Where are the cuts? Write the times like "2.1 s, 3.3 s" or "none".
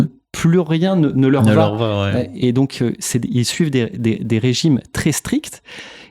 none